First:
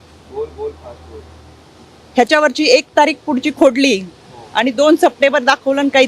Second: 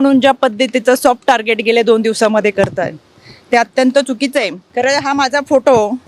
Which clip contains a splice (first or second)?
second